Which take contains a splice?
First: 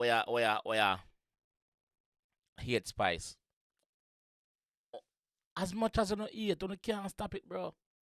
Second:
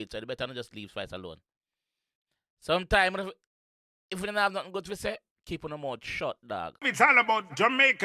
second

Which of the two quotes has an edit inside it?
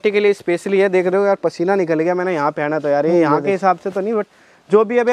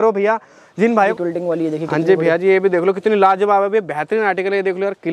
second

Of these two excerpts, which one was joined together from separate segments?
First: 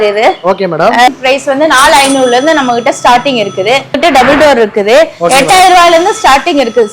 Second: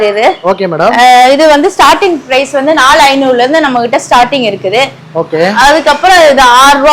first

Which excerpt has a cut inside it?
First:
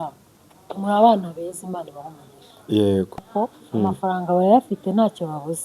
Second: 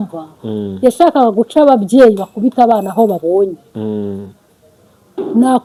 first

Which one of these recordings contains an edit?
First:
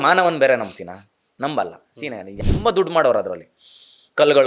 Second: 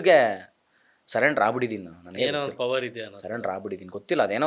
first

